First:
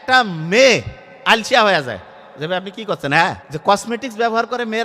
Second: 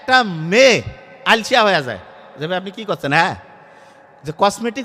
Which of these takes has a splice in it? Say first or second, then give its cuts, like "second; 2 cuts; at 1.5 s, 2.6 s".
first; 1 cut; at 3.5 s